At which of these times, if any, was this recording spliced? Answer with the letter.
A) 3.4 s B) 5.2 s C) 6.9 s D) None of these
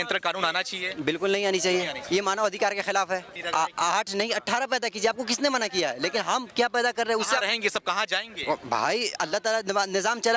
A